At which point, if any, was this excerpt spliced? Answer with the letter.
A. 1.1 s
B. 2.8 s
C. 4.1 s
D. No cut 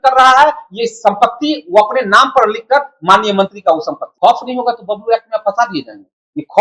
C